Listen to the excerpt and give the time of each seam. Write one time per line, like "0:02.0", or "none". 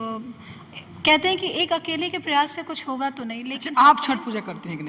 0:03.6